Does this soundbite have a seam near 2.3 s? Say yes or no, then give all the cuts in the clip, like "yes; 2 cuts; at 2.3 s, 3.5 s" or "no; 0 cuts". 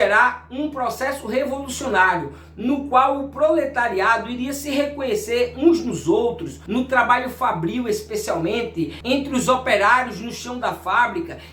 no; 1 cut; at 6.5 s